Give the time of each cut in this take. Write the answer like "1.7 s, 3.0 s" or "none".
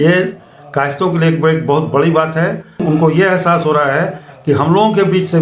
2.8 s